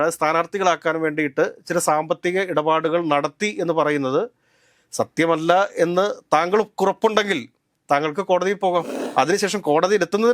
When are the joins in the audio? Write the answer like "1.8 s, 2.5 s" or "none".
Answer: 9.0 s